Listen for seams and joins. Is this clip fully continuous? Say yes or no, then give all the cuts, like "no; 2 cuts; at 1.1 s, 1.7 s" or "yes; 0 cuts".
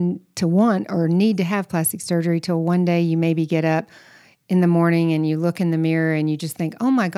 yes; 0 cuts